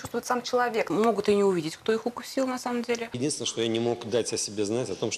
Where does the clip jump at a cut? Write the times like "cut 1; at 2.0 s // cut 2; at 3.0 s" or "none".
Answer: cut 1; at 0.9 s // cut 2; at 3.2 s